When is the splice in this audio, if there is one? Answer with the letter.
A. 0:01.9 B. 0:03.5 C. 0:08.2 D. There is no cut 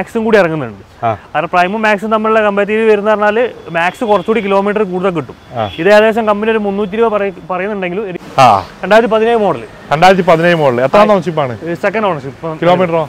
C